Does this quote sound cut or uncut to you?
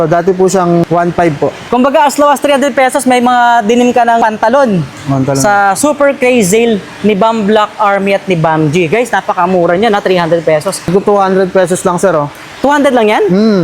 cut